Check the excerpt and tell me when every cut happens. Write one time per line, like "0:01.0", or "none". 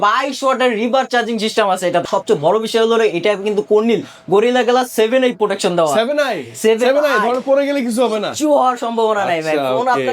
0:02.0